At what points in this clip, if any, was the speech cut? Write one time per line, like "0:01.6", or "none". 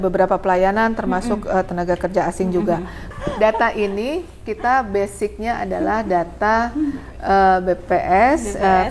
0:03.1

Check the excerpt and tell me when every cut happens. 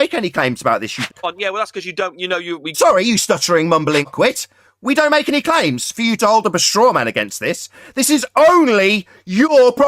0:01.1
0:04.1

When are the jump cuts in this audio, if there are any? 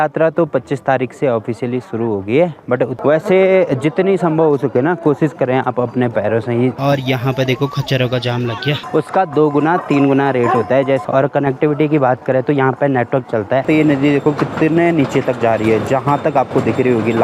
0:02.9
0:06.8
0:08.8
0:11.0
0:13.6

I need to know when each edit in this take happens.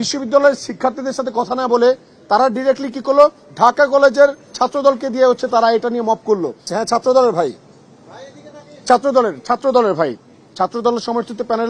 0:06.7

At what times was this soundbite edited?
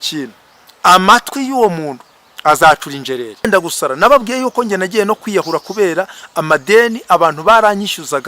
0:03.5

